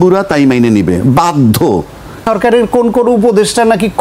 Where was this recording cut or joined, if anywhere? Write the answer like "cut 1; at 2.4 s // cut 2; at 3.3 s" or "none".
cut 1; at 2.2 s